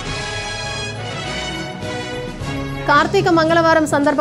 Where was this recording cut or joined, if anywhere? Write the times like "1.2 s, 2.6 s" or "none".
2.3 s